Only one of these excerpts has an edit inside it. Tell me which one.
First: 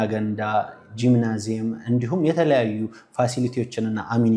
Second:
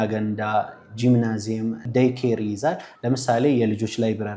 second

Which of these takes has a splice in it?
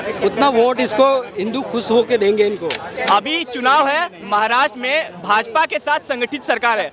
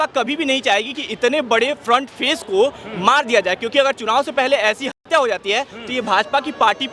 first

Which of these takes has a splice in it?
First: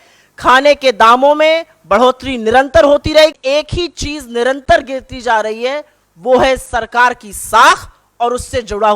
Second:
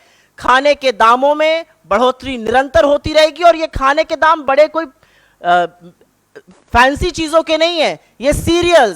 first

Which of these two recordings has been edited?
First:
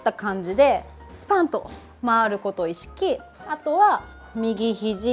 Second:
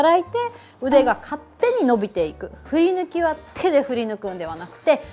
second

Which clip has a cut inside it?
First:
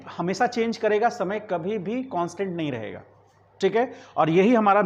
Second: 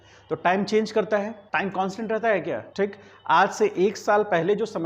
second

